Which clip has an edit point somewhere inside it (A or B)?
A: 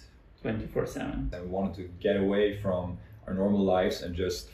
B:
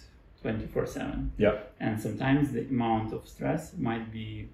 A